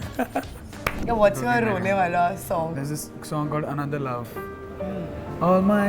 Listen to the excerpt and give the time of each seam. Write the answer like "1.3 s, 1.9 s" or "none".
1.0 s, 2.7 s